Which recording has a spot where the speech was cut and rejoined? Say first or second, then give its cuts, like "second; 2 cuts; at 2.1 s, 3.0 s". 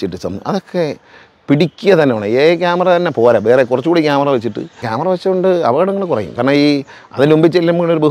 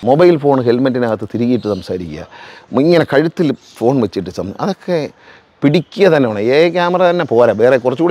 first; 1 cut; at 4.9 s